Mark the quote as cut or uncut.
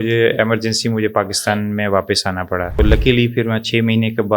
cut